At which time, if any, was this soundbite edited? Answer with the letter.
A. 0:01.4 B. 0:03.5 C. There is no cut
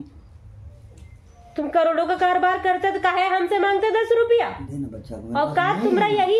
C